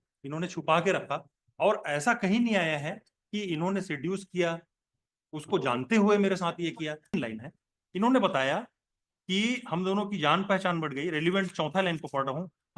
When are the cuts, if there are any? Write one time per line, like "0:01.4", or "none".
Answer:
0:07.1